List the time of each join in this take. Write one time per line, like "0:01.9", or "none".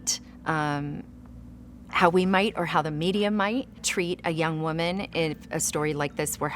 0:03.8